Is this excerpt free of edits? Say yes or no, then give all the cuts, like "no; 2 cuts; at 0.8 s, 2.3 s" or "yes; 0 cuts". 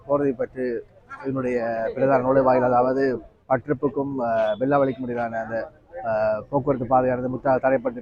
yes; 0 cuts